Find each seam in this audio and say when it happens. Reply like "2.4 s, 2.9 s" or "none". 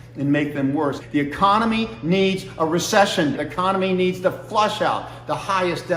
1.0 s, 3.3 s

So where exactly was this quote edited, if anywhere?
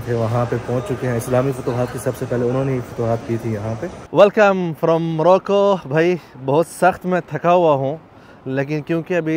none

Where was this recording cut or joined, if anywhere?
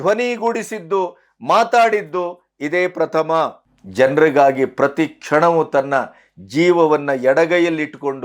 3.7 s

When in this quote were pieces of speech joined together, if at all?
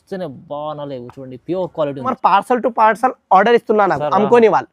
2.2 s

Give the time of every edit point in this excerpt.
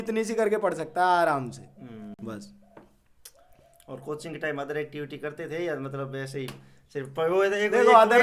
none

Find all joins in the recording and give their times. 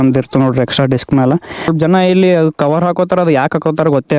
1.7 s

